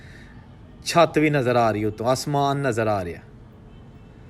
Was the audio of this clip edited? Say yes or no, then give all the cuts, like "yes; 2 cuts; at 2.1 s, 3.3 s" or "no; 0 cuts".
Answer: no; 0 cuts